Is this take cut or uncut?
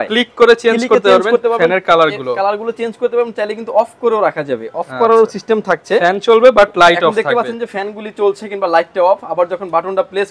uncut